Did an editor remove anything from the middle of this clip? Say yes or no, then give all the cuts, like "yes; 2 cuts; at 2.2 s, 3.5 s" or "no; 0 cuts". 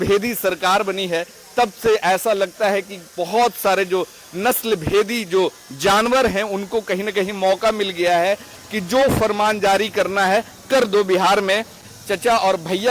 yes; 1 cut; at 11.8 s